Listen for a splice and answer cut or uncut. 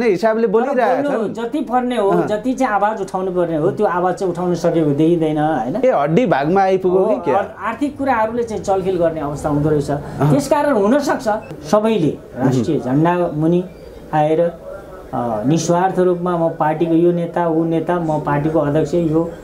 cut